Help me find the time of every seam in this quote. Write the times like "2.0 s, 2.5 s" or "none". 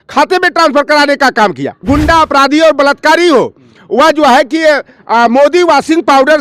1.7 s